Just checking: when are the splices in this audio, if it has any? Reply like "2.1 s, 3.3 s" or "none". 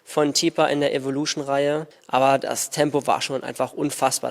1.9 s

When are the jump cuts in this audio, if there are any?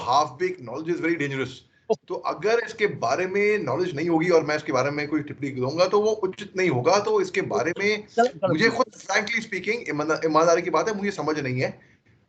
none

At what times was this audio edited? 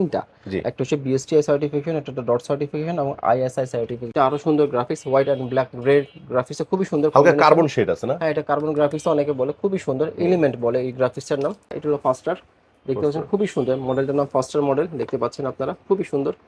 4.1 s, 11.7 s

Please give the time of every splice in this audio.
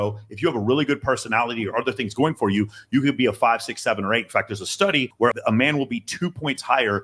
5.3 s

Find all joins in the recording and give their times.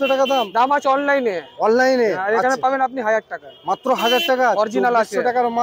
none

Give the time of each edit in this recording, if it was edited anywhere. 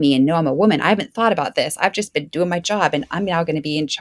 none

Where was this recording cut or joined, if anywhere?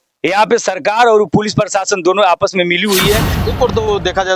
3.4 s

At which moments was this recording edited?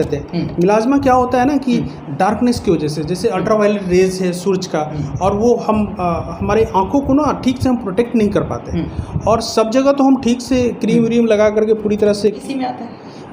12.4 s

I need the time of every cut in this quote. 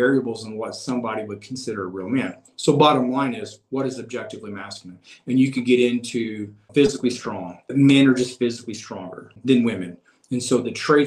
6.7 s, 7.6 s, 9.4 s

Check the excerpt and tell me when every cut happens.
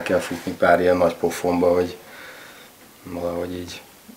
none

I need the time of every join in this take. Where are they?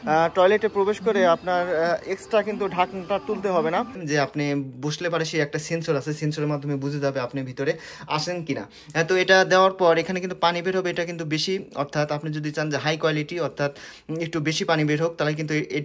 4.0 s

